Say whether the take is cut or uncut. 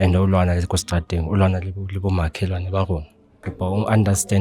cut